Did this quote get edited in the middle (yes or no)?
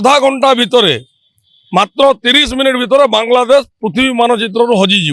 no